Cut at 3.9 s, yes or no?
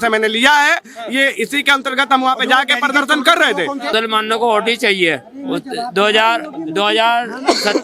yes